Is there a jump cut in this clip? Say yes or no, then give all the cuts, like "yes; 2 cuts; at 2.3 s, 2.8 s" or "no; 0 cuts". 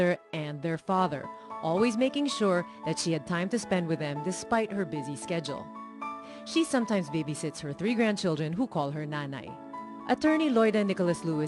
yes; 1 cut; at 4.9 s